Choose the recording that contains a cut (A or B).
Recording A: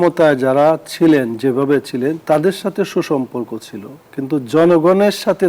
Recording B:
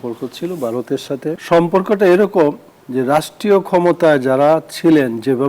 B